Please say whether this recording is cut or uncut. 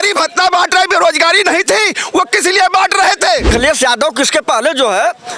cut